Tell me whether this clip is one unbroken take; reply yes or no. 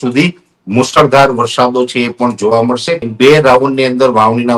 no